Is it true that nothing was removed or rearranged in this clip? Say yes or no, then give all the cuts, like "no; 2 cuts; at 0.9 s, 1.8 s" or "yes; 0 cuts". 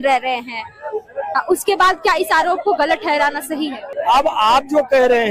no; 1 cut; at 3.8 s